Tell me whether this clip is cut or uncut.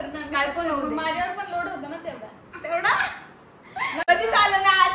cut